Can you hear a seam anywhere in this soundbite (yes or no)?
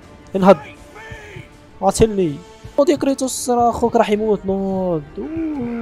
yes